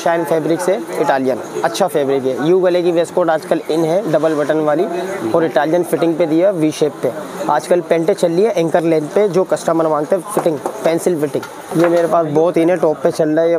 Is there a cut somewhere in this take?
yes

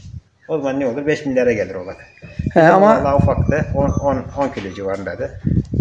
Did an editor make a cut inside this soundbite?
no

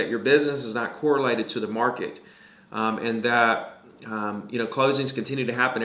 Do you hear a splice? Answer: no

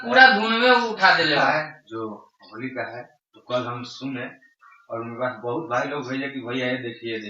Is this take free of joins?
no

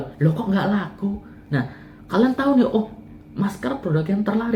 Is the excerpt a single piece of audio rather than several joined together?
no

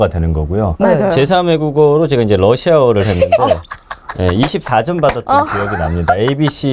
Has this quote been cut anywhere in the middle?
no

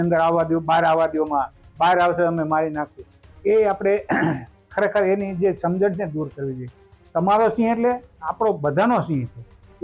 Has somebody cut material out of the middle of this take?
no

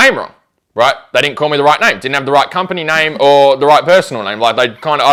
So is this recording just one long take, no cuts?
yes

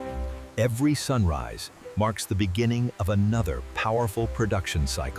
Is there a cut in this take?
no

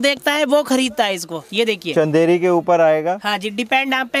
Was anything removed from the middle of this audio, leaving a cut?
no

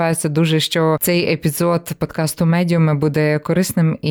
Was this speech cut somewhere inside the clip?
yes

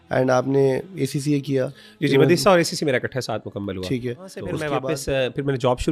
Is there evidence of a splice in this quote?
yes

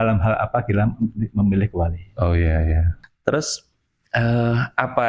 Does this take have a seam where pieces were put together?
no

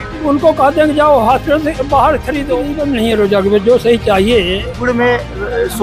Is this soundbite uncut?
no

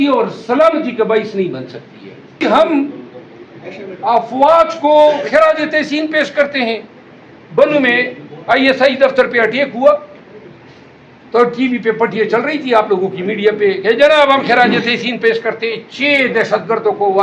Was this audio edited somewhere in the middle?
yes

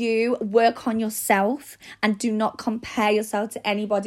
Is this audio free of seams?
yes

